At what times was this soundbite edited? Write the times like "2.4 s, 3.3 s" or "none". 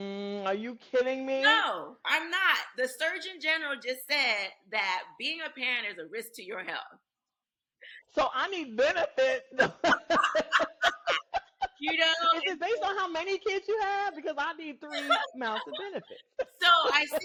none